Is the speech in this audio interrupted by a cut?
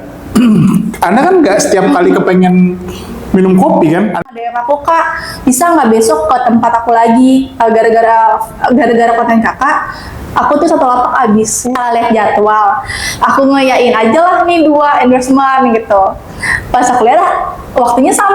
yes; 2 cuts; at 4.2 s, 11.7 s

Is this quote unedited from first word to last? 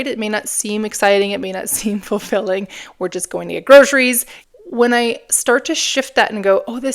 no; 1 cut; at 4.3 s

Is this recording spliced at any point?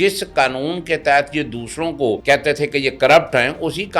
yes; 1 cut; at 2.2 s

